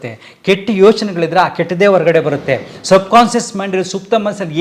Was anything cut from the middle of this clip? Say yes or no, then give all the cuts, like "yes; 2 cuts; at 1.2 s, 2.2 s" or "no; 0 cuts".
no; 0 cuts